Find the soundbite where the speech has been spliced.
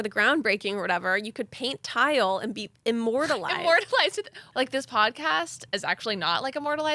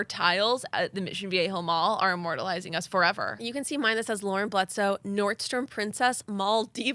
first; 2 cuts; at 4.3 s, 5.7 s

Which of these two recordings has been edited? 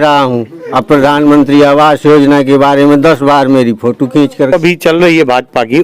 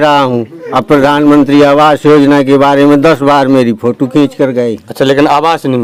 first; 1 cut; at 4.5 s

